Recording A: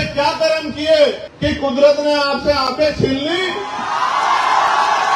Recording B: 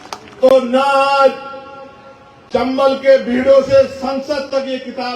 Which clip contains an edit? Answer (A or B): A